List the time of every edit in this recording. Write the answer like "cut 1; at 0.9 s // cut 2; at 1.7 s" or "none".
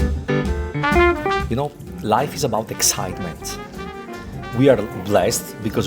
cut 1; at 1.4 s